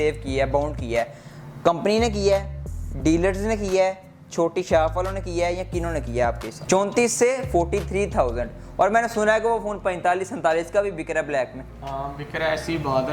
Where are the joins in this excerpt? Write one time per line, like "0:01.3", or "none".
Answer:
0:06.5